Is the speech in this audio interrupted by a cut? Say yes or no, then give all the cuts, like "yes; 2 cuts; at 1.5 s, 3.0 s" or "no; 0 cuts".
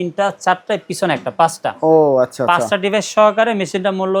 no; 0 cuts